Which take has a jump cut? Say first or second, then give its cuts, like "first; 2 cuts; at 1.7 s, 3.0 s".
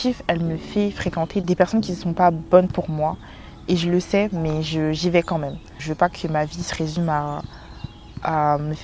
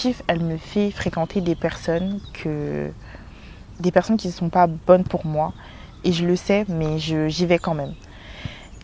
first; 2 cuts; at 1.4 s, 5.8 s